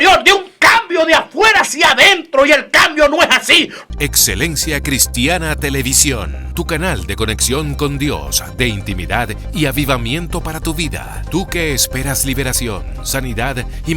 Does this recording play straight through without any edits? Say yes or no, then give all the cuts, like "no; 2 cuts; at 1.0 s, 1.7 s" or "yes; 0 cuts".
no; 1 cut; at 3.8 s